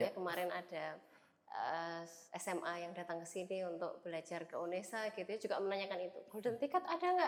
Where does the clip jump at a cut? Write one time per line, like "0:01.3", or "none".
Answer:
none